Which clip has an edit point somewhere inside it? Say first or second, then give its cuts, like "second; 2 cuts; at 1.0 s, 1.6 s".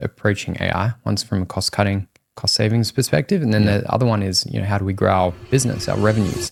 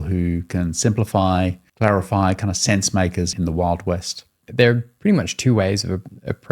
second; 3 cuts; at 1.6 s, 3.3 s, 4.4 s